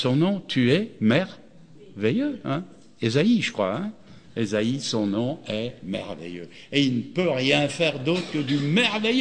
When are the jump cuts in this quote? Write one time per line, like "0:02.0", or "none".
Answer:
none